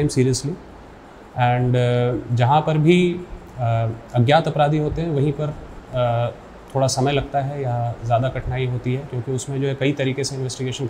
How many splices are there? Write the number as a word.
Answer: zero